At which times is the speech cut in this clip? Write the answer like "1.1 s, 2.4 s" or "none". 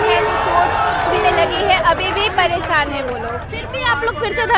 3.5 s